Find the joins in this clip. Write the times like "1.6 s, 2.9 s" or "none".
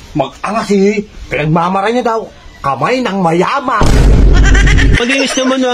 3.8 s, 5.0 s

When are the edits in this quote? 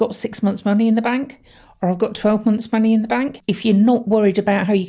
3.4 s

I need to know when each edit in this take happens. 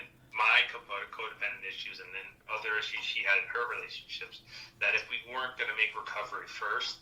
none

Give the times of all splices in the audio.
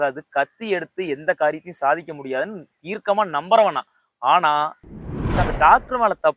5.3 s

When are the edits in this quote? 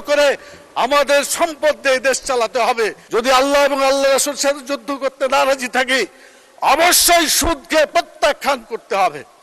3.0 s

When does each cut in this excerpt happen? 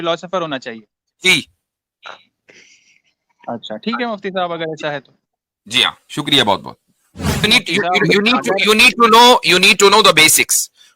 7.4 s

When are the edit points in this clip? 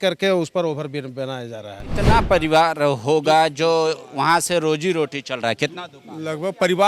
1.9 s

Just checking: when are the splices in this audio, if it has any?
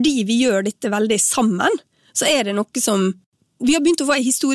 3.3 s

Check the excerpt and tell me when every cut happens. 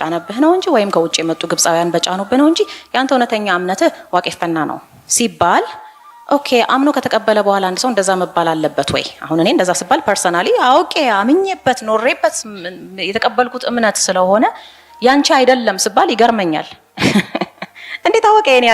none

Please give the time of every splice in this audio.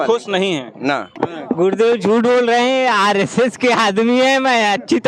1.1 s

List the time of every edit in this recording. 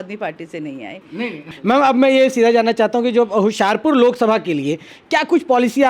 1.4 s

